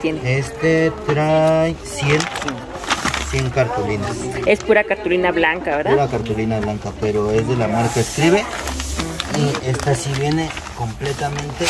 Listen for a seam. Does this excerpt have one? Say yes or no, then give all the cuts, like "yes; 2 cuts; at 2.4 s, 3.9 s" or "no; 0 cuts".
no; 0 cuts